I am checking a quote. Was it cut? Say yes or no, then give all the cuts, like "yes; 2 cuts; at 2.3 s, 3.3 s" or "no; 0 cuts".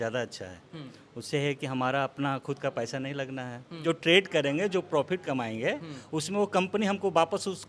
yes; 1 cut; at 3.8 s